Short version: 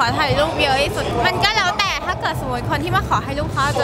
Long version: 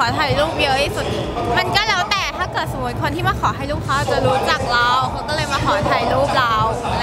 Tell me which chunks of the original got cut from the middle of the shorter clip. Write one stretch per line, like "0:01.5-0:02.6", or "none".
0:01.1-0:01.4